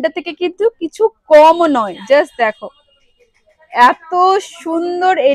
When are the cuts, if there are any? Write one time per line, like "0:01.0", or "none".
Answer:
none